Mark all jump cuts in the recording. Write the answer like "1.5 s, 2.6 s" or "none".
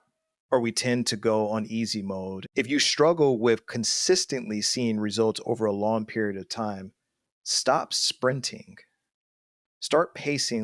2.4 s